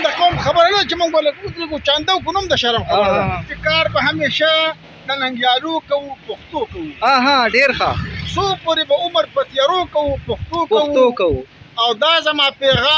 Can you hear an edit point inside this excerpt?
yes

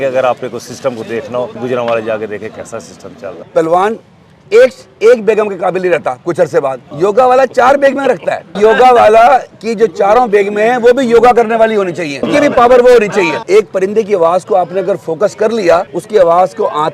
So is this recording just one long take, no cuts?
no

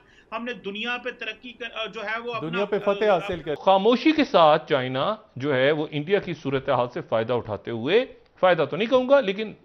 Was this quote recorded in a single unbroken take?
no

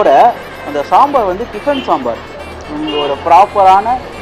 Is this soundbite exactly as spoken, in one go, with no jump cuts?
yes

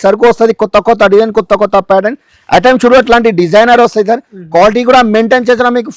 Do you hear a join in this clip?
no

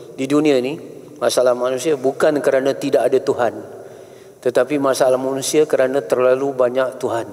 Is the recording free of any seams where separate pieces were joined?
yes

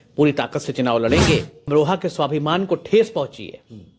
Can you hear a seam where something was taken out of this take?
yes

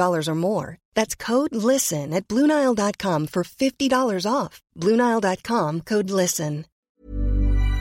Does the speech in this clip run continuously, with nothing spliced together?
no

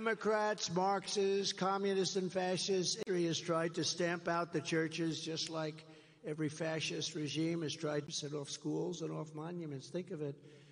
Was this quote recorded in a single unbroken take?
yes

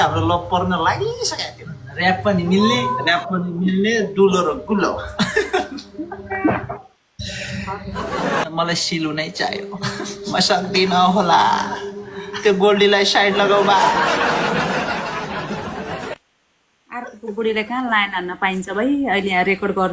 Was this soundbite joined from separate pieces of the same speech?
yes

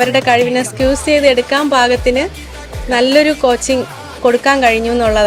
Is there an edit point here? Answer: no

